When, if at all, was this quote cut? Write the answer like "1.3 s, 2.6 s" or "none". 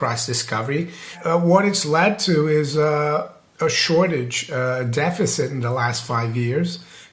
1.2 s